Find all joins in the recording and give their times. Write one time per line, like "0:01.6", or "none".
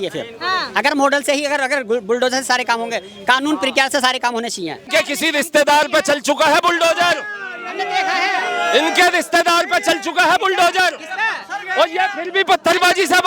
0:04.9